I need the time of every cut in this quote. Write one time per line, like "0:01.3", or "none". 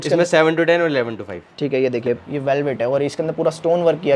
0:02.3